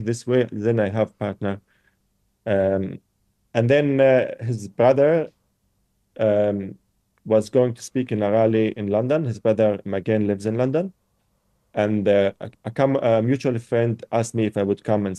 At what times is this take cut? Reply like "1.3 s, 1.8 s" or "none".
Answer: none